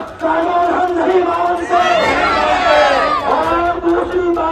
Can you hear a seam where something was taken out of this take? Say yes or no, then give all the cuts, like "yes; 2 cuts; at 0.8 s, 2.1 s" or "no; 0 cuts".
no; 0 cuts